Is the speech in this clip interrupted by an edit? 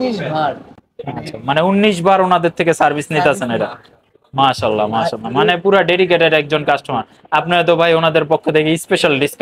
no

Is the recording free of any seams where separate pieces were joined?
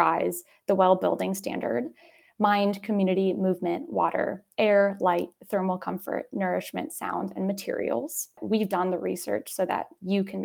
no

